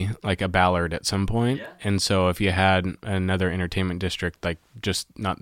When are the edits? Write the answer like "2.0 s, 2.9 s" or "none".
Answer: none